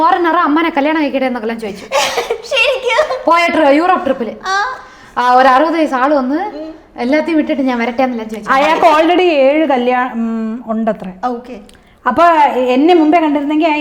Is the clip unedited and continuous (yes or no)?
yes